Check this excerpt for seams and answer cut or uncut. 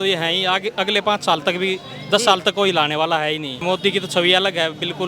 cut